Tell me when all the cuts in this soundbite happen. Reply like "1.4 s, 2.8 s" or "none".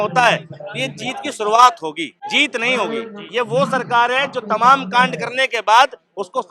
2.2 s, 3.2 s